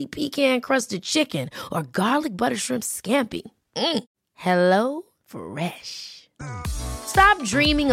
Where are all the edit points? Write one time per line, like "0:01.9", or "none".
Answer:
none